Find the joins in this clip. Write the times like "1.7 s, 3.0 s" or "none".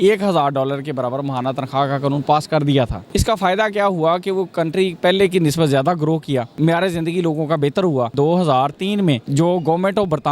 3.0 s, 6.5 s, 8.1 s, 9.2 s

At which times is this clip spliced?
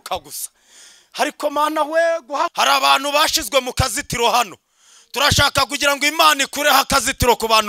2.5 s

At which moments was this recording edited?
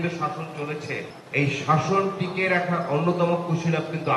1.2 s

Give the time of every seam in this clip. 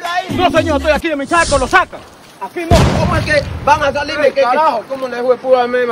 3.0 s

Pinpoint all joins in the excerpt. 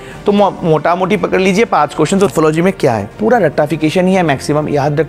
2.3 s

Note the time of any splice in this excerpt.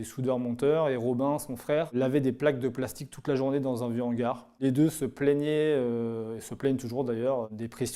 none

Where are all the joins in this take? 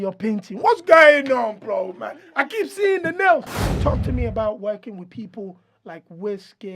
3.6 s

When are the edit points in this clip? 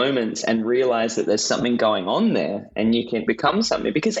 3.3 s

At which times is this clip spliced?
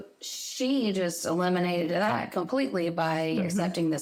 none

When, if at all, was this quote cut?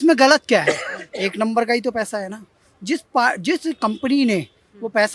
none

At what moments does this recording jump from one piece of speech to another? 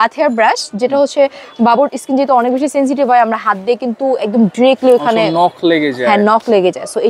none

